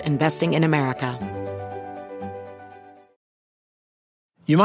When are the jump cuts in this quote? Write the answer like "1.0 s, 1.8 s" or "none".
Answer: 1.1 s